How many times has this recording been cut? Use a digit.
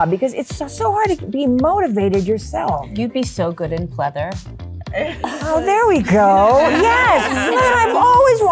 0